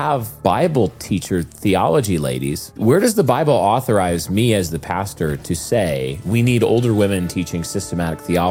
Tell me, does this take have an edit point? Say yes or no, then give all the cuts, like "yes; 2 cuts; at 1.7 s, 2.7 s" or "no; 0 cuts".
no; 0 cuts